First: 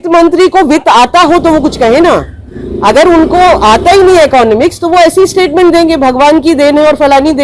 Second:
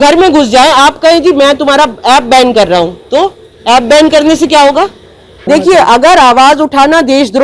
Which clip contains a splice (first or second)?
second